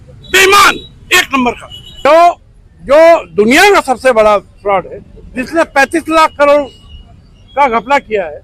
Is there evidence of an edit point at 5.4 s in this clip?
no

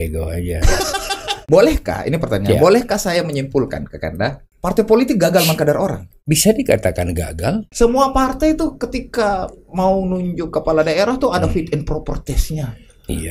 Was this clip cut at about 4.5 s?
yes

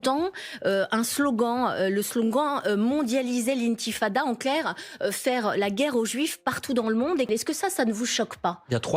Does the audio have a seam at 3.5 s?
no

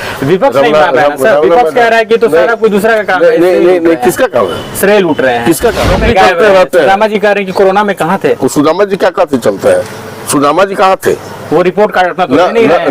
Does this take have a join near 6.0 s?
yes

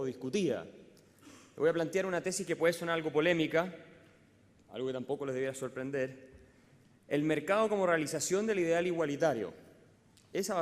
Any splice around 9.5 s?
yes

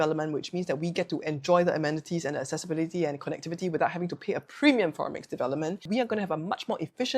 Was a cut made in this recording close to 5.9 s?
yes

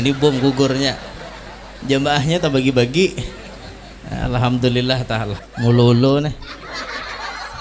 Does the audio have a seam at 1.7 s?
no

